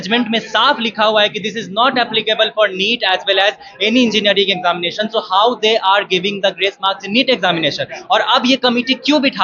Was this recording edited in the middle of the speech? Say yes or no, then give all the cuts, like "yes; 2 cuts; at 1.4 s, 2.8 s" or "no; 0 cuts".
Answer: no; 0 cuts